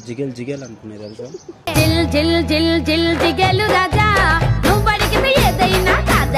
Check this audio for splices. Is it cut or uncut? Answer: cut